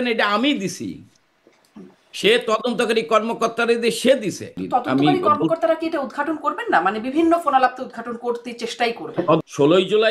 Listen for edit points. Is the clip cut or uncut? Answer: cut